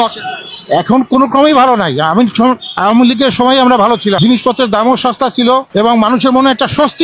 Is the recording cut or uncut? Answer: cut